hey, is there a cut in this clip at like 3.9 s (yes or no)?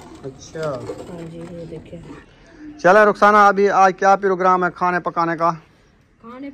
no